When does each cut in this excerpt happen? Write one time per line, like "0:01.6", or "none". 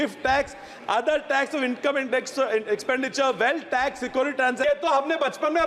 0:04.6